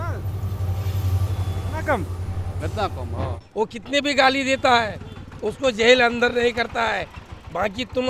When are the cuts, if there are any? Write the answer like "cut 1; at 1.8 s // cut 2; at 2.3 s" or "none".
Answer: cut 1; at 3.4 s